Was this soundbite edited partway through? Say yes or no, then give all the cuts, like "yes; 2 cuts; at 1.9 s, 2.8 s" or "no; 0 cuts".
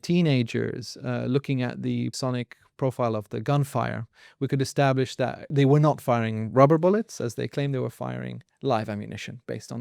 yes; 2 cuts; at 2.1 s, 5.5 s